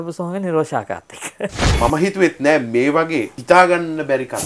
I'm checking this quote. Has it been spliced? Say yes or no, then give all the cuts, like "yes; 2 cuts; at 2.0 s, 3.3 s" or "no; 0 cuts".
yes; 2 cuts; at 1.7 s, 3.3 s